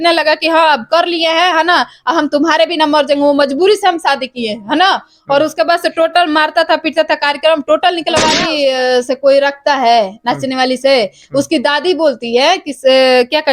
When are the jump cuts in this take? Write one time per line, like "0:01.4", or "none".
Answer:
0:08.6